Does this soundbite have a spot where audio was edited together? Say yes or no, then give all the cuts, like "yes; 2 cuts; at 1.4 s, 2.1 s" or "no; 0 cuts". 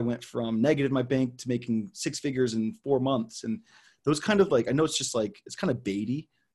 no; 0 cuts